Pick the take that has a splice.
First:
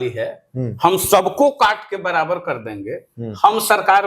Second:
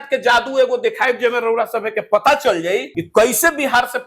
second; 1 cut; at 3.0 s

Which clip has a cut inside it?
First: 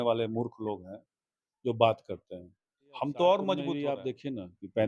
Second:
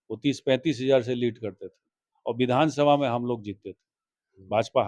first; 1 cut; at 3.7 s

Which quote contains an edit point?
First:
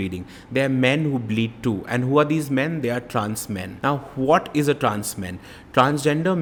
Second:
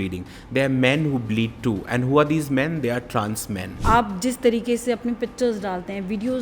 second; 1 cut; at 3.7 s

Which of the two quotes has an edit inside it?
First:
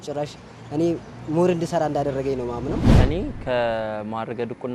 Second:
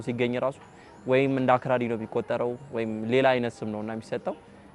first; 1 cut; at 2.9 s

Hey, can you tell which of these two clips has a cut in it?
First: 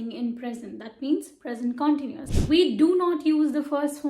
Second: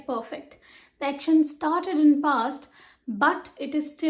first; 1 cut; at 2.1 s

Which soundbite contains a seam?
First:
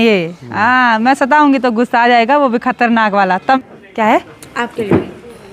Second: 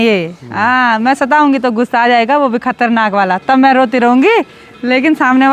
first; 1 cut; at 3.6 s

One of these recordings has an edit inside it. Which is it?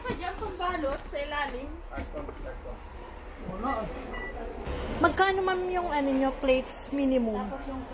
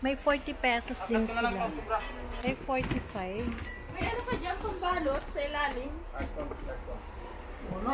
first; 1 cut; at 4.7 s

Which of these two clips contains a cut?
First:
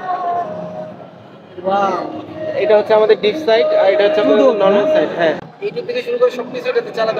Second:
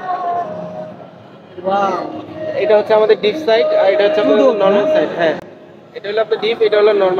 first; 1 cut; at 5.5 s

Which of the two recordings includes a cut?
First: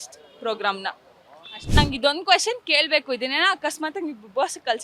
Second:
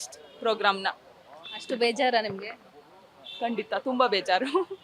first; 1 cut; at 1.7 s

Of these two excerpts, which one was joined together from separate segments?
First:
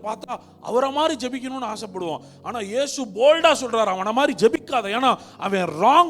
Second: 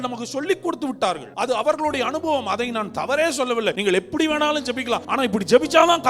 second; 3 cuts; at 1.3 s, 3.8 s, 5.1 s

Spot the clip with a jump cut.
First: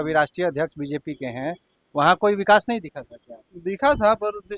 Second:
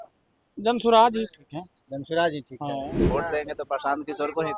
second; 1 cut; at 3.0 s

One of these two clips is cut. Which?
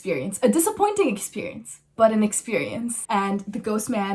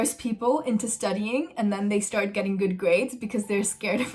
first; 1 cut; at 3.0 s

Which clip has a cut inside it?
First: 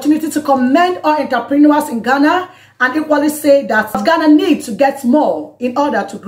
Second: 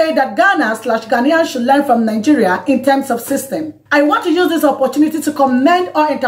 second; 1 cut; at 3.7 s

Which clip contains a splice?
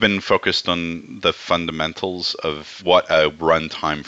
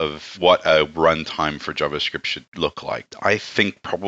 second; 1 cut; at 2.7 s

